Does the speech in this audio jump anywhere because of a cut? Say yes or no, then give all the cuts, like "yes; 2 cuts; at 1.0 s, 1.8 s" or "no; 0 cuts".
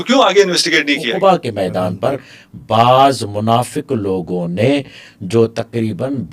yes; 1 cut; at 1.1 s